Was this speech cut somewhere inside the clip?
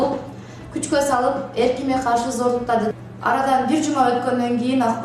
yes; 1 cut; at 2.9 s

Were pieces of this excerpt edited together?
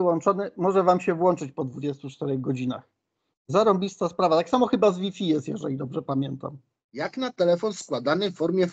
yes; 1 cut; at 6.8 s

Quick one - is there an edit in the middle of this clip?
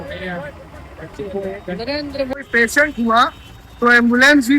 yes; 1 cut; at 2.4 s

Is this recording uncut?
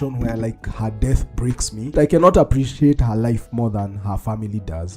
no; 1 cut; at 2.0 s

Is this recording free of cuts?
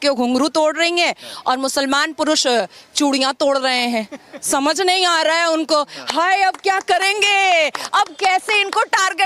yes; 0 cuts

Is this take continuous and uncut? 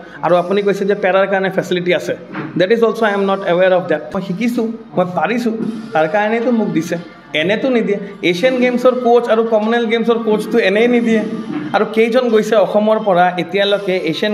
no; 1 cut; at 4.2 s

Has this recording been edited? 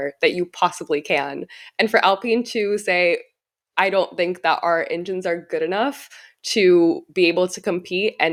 no; 0 cuts

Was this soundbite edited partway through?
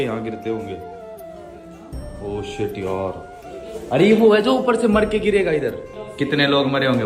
no; 0 cuts

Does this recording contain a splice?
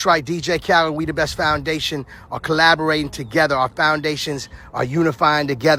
no; 0 cuts

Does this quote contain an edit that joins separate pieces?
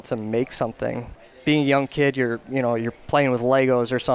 no; 0 cuts

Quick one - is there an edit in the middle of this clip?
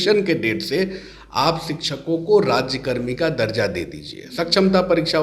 no; 0 cuts

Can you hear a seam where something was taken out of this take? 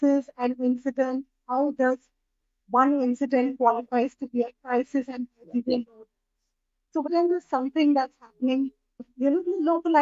no; 0 cuts

